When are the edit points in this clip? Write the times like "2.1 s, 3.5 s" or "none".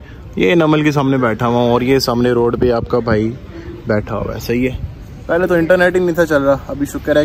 none